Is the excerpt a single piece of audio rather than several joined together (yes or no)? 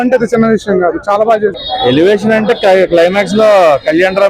no